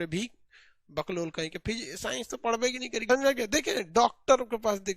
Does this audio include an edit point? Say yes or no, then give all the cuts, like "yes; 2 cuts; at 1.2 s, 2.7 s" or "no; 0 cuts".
yes; 1 cut; at 3.1 s